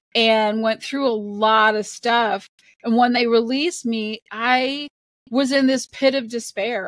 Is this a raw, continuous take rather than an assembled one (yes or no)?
yes